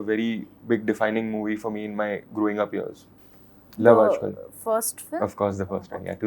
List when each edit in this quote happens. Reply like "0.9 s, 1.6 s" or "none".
none